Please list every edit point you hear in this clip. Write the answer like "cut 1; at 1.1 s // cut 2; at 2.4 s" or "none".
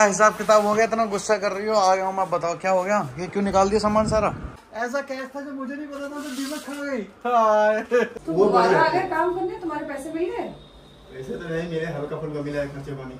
cut 1; at 4.6 s // cut 2; at 8.1 s